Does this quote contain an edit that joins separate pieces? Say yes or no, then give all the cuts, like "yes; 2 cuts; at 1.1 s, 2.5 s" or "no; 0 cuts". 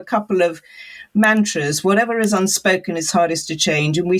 no; 0 cuts